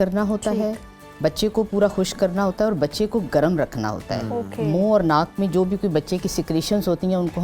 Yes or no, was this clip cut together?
no